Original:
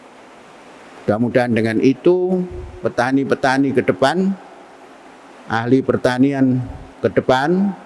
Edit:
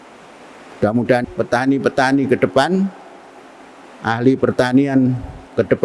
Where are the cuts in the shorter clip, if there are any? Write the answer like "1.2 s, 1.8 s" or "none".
1.2 s